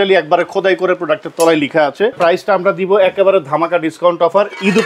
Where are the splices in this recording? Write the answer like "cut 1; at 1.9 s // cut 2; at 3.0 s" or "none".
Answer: cut 1; at 2.2 s